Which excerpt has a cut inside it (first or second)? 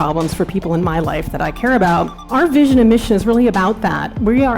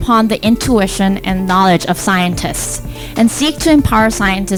first